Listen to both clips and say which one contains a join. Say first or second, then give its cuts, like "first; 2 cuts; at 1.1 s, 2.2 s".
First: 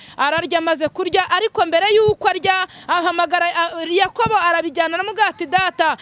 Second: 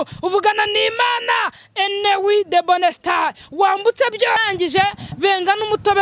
second; 1 cut; at 4.4 s